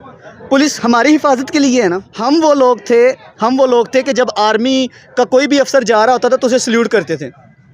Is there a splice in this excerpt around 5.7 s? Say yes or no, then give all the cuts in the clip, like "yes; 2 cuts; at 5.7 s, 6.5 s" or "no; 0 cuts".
no; 1 cut; at 2.1 s